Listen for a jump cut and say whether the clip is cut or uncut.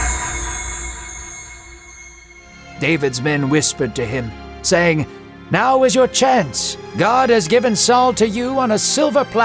cut